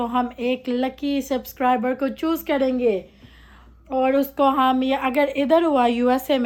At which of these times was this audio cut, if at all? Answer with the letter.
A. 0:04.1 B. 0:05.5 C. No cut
C